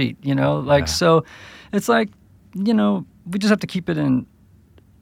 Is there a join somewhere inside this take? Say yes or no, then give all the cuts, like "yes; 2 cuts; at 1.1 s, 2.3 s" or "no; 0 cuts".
no; 0 cuts